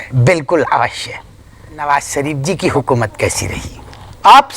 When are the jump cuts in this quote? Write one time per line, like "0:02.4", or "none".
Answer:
0:01.8